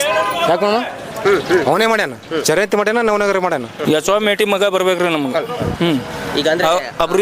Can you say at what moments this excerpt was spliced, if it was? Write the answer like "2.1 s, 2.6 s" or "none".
3.7 s